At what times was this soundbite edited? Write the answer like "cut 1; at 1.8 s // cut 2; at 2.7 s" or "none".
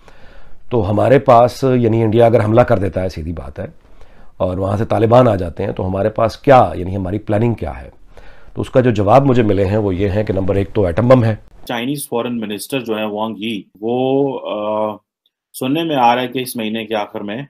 cut 1; at 11.6 s // cut 2; at 13.7 s